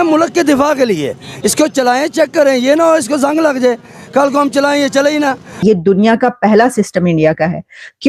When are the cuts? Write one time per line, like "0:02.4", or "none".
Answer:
0:05.6